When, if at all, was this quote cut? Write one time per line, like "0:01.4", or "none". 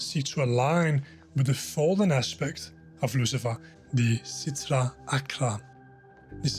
0:03.7